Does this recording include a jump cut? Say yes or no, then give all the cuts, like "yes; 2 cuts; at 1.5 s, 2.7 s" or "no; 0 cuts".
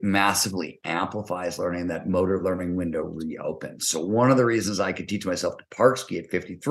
no; 0 cuts